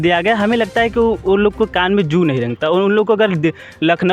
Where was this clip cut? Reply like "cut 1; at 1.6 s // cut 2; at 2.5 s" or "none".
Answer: none